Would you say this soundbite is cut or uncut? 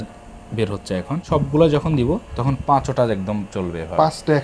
cut